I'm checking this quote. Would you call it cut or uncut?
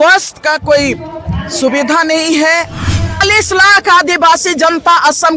cut